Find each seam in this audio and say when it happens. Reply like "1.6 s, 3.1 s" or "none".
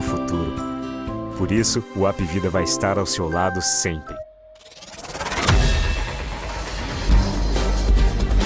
4.1 s